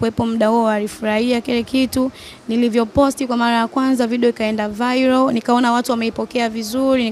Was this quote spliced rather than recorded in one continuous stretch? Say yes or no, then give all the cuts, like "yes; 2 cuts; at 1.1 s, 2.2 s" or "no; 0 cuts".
no; 0 cuts